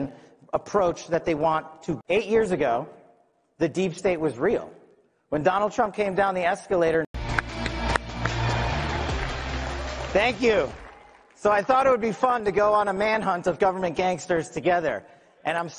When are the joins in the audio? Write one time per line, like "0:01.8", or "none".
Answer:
0:02.0
0:07.2
0:12.1